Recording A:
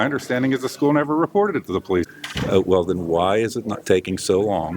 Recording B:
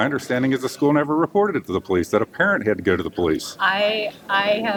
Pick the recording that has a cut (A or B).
A